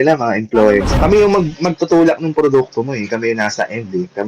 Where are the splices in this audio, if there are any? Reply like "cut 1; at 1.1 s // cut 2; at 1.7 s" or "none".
cut 1; at 0.9 s